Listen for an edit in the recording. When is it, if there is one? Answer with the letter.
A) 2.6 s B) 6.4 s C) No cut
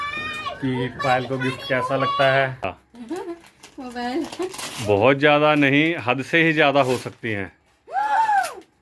A